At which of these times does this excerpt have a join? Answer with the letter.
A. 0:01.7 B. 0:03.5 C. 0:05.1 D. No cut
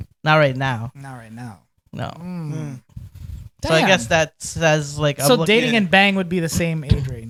D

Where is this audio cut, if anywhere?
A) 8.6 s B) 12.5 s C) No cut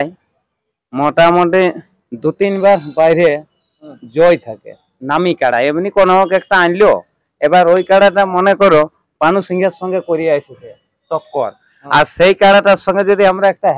C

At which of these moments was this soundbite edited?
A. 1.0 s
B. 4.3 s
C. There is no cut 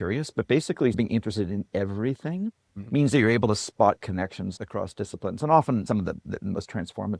A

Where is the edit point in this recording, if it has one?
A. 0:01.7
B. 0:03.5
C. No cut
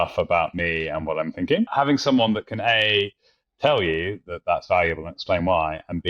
A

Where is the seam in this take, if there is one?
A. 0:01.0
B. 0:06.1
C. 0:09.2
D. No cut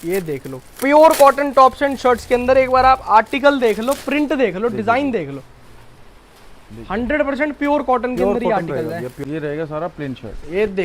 C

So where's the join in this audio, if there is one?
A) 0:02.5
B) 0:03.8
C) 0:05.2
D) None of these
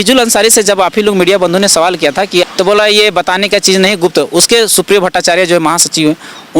A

